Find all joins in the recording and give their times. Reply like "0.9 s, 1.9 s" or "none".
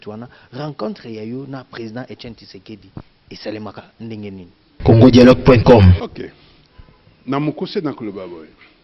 4.6 s, 6.0 s